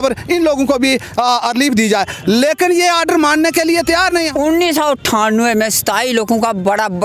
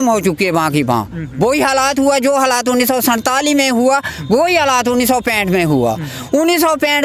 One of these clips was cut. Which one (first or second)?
first